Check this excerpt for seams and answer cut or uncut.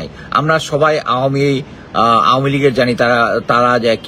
uncut